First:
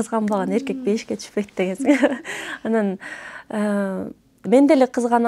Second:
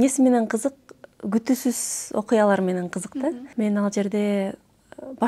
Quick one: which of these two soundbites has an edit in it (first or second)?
second